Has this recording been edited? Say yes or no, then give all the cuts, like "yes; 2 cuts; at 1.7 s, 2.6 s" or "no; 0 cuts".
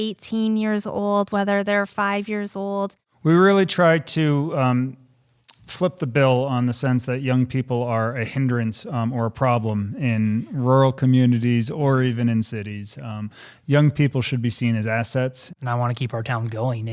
yes; 2 cuts; at 3.0 s, 15.5 s